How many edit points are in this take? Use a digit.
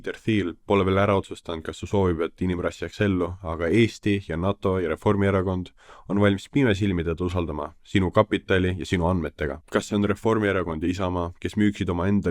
2